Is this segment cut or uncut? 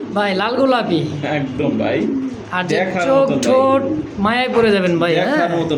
uncut